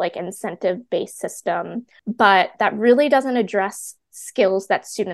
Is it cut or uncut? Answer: cut